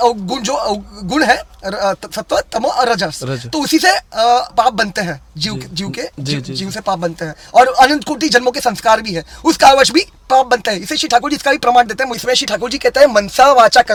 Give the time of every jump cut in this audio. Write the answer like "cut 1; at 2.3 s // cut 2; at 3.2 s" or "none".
none